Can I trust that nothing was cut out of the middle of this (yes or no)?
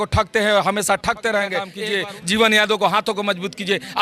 no